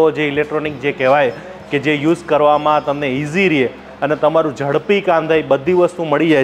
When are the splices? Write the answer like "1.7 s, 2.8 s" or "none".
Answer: none

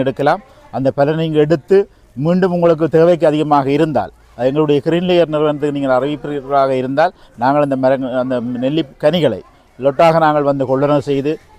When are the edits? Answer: none

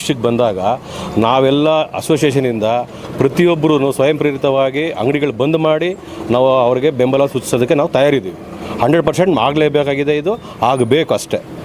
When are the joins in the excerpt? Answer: none

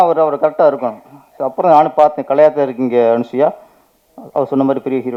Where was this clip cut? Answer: none

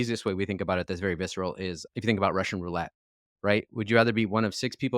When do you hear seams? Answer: 1.8 s

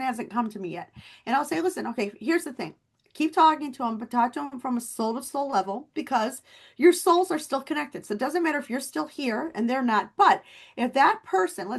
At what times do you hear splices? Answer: none

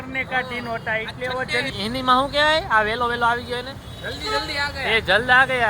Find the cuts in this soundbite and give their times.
1.7 s

